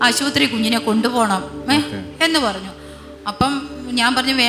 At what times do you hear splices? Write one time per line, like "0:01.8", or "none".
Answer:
none